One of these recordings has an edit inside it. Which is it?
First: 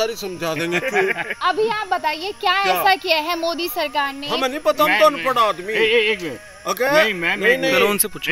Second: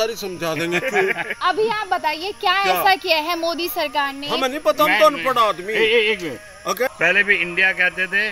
second; 1 cut; at 6.9 s

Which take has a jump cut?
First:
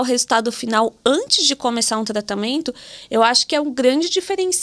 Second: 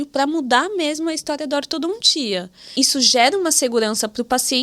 second; 1 cut; at 2.7 s

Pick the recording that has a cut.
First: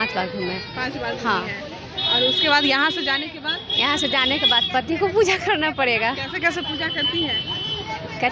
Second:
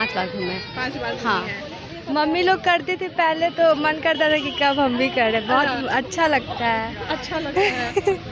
second; 1 cut; at 1.9 s

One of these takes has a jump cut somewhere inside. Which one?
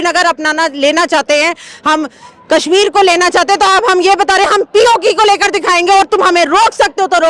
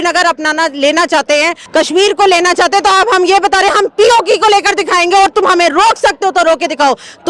second; 1 cut; at 1.6 s

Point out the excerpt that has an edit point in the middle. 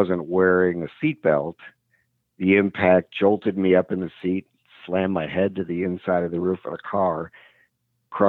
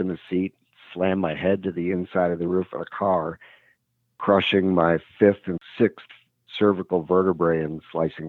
second; 1 cut; at 5.6 s

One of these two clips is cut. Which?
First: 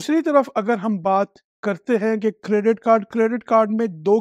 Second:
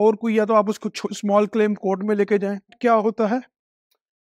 second; 1 cut; at 2.8 s

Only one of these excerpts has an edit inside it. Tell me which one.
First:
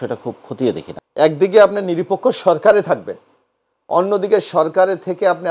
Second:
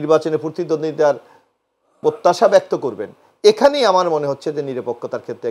first; 1 cut; at 1.0 s

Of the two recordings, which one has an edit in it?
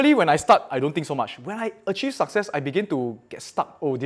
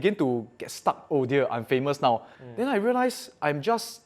second; 1 cut; at 2.4 s

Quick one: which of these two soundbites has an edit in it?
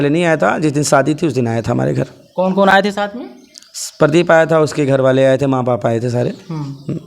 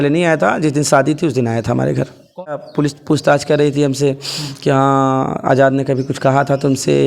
second; 1 cut; at 2.5 s

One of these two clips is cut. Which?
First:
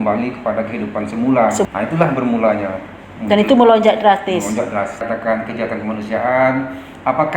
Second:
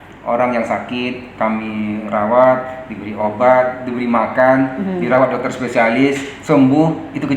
first; 2 cuts; at 1.7 s, 5.0 s

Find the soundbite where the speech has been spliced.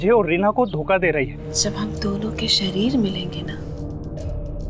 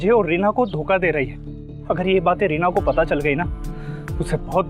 first; 1 cut; at 1.4 s

